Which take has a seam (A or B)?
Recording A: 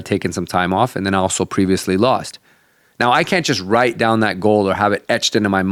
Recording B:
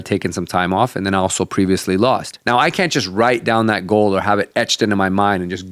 B